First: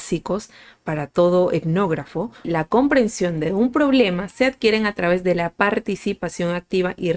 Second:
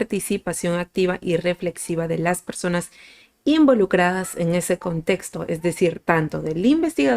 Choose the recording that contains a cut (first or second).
first